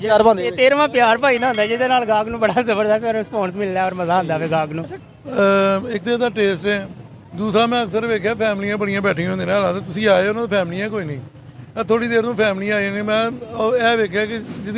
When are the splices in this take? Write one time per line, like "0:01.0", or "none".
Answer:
0:04.9